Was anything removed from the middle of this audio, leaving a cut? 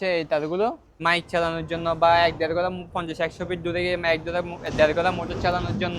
yes; 1 cut; at 1.0 s

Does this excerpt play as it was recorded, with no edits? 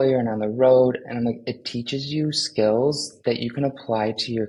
yes; 0 cuts

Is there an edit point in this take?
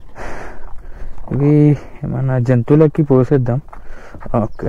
no; 0 cuts

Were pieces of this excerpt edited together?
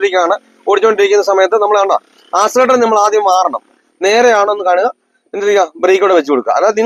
yes; 1 cut; at 3.9 s

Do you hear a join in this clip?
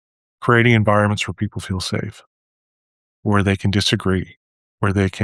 no; 0 cuts

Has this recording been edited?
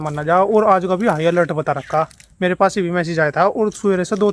no; 0 cuts

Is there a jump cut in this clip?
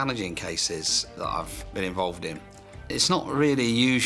no; 0 cuts

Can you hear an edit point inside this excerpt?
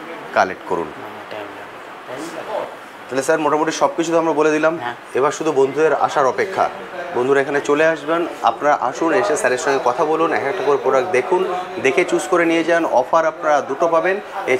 no; 0 cuts

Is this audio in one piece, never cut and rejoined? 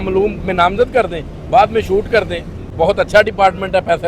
yes; 0 cuts

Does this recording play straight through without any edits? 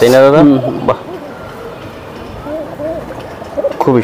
yes; 0 cuts

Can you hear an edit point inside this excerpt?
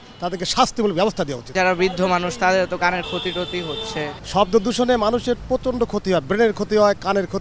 yes; 2 cuts; at 1.4 s, 4.2 s

